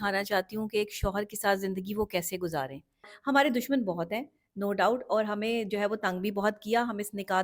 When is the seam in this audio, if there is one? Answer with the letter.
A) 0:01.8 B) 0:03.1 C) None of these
B